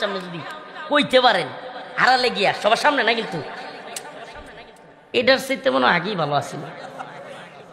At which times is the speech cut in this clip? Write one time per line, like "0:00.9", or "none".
none